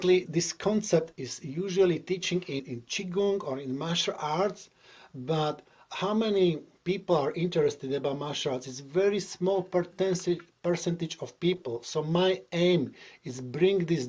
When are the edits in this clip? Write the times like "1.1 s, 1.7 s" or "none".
2.7 s, 6.7 s